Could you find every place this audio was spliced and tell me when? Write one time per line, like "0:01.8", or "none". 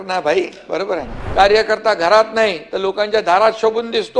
0:01.2